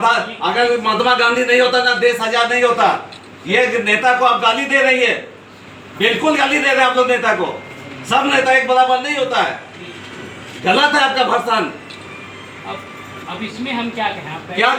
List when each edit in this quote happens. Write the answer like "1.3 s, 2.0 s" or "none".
none